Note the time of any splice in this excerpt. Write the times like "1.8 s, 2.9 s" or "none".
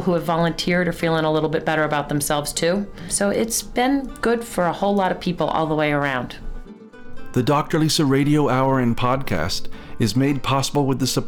3.1 s, 7.0 s